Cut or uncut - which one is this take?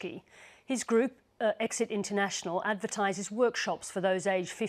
uncut